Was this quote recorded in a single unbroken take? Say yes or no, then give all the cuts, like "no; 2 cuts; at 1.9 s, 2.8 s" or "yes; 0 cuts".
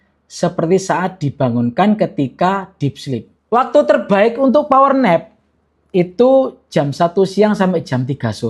no; 1 cut; at 3.3 s